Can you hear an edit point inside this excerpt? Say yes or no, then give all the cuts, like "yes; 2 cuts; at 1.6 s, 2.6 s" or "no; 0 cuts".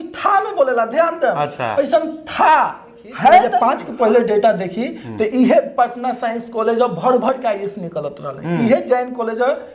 yes; 1 cut; at 3.5 s